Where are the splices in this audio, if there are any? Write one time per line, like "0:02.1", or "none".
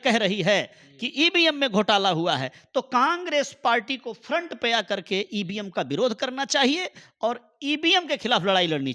none